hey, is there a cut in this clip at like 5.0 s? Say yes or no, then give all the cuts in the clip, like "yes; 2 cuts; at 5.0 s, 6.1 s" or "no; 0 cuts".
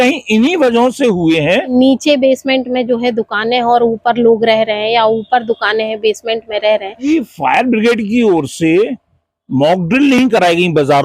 no; 2 cuts; at 1.7 s, 7.1 s